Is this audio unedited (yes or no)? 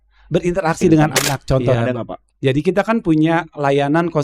no